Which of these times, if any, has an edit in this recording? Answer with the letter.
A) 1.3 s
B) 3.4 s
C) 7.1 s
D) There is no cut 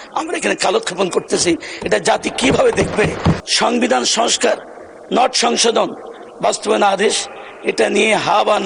B